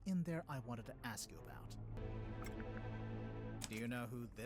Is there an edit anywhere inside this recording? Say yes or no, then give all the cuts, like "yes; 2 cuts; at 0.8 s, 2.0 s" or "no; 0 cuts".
yes; 1 cut; at 2.0 s